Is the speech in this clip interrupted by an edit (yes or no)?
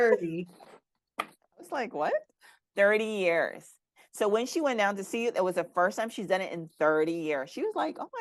no